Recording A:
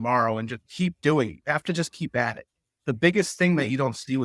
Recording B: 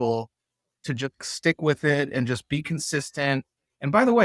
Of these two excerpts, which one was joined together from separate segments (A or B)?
B